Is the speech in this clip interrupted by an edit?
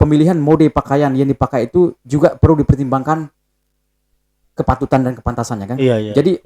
no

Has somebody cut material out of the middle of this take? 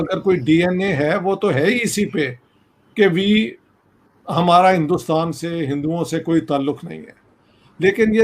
no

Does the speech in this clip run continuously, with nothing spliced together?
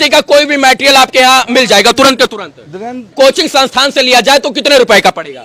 no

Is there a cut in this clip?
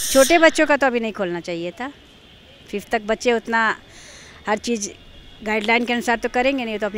no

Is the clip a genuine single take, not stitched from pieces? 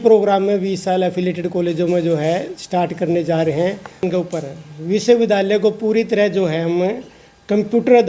no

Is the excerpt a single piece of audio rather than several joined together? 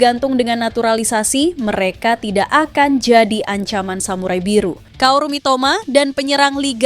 no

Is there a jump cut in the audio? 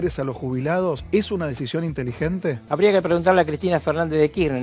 yes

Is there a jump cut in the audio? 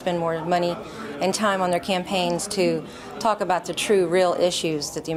no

